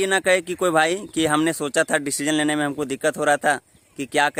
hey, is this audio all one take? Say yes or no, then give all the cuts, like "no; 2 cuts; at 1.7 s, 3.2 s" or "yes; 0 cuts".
yes; 0 cuts